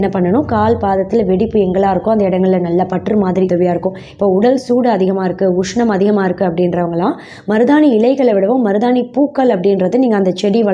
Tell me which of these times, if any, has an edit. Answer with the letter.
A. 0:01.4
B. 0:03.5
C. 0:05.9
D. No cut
B